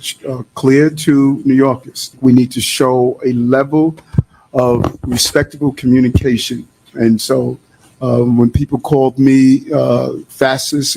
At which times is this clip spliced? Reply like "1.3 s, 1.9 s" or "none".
2.2 s